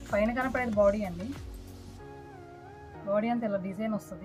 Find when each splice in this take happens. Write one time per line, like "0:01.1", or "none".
0:01.3
0:03.0